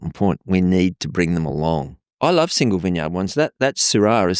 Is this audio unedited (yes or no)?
no